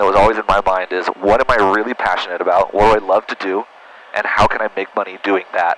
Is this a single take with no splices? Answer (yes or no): yes